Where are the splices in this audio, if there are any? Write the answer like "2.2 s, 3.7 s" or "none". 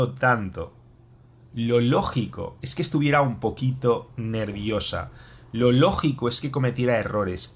none